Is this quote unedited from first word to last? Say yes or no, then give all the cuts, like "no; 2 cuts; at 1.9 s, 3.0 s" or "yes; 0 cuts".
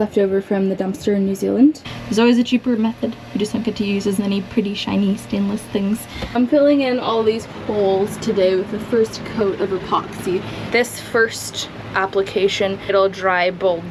no; 4 cuts; at 1.8 s, 6.4 s, 10.6 s, 12.9 s